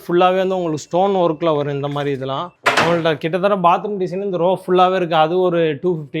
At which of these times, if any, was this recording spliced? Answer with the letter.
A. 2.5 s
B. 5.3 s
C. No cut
A